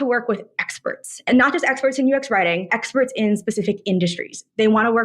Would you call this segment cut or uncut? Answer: cut